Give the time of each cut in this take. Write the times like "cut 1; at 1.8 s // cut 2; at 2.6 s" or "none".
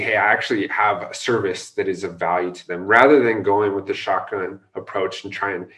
none